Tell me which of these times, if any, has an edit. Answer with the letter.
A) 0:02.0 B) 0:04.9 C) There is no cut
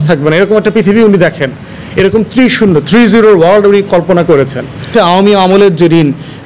B